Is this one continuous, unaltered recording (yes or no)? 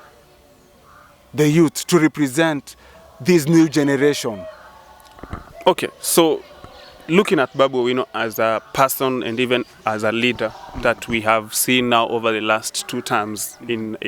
yes